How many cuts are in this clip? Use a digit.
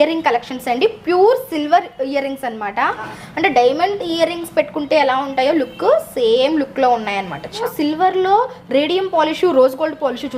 2